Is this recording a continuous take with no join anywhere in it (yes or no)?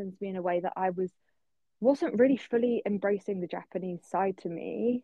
yes